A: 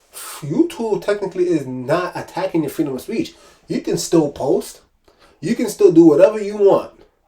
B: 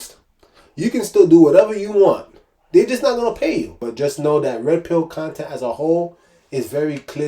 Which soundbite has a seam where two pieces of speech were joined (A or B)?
B